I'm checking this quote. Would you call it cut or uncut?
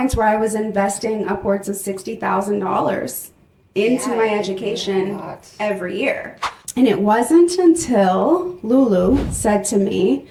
uncut